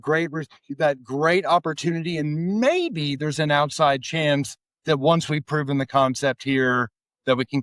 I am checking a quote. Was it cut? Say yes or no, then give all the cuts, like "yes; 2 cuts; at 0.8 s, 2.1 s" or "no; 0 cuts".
no; 0 cuts